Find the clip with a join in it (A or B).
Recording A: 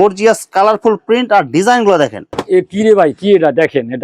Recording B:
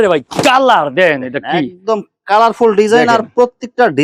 A